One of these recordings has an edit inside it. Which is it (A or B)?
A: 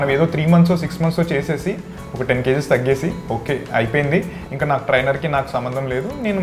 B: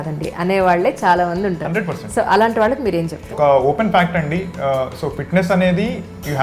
B